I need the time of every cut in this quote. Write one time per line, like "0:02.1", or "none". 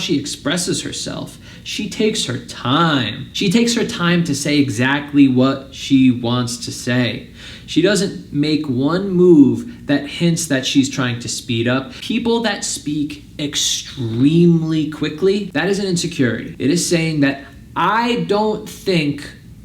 0:12.0
0:16.5